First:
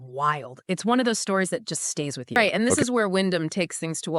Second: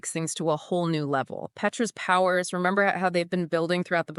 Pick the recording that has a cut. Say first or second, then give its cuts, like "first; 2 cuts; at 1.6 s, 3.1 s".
first; 1 cut; at 2.4 s